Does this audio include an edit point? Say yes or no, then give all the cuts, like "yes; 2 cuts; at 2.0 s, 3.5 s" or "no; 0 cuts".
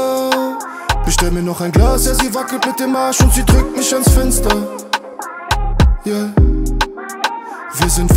no; 0 cuts